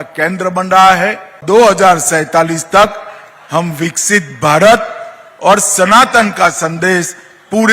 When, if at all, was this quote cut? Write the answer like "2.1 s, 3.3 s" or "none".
1.4 s